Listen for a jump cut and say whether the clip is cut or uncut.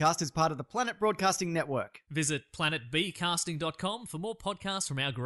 uncut